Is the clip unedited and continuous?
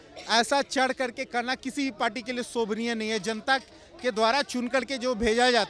yes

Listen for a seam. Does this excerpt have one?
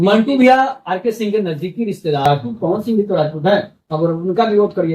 yes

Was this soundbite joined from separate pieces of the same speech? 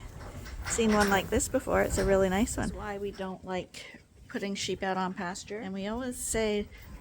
yes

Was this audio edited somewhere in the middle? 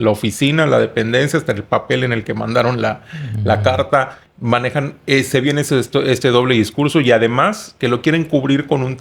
no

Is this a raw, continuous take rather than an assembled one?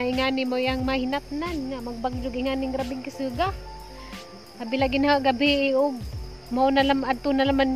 yes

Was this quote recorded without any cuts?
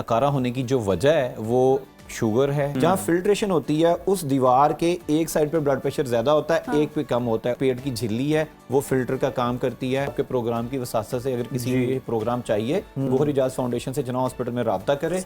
no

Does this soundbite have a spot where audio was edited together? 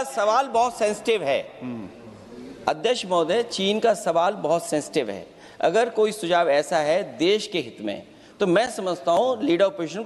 no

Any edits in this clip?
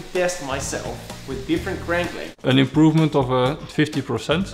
yes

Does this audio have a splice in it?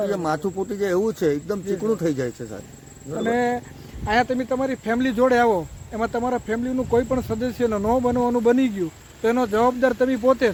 no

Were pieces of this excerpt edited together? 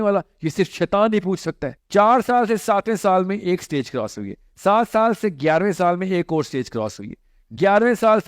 yes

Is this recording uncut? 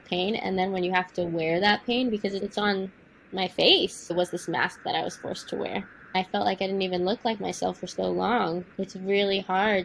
no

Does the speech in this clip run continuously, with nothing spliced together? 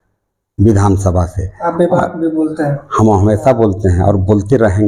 yes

